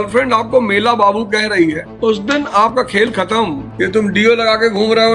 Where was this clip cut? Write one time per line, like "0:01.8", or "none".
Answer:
0:01.9
0:03.6

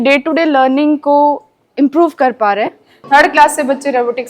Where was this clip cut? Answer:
0:02.9

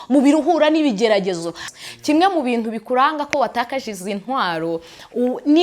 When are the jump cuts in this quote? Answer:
0:01.6

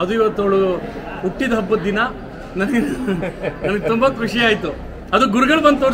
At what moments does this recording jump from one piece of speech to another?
none

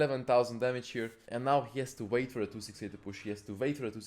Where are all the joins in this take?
0:01.2

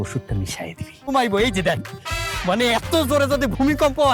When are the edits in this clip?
0:01.1

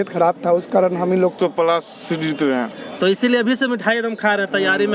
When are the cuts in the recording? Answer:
0:01.3

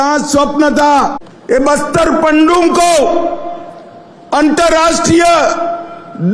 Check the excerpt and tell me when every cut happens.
0:01.3

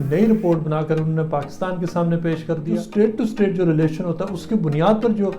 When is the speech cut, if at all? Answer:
0:02.7

